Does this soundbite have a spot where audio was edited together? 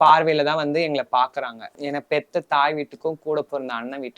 yes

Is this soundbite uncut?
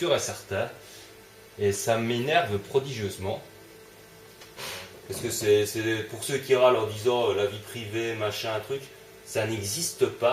no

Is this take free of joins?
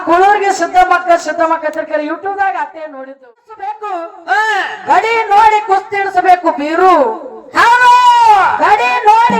no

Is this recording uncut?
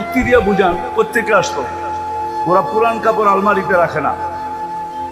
no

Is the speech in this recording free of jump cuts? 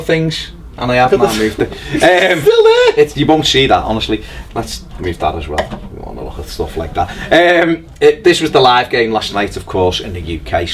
no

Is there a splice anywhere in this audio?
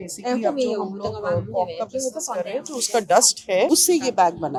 no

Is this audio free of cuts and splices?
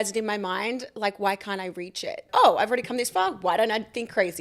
no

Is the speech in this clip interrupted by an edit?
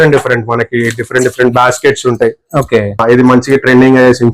yes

